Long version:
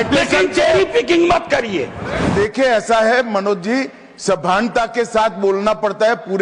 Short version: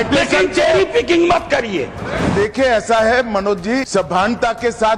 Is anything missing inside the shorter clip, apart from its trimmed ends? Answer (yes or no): yes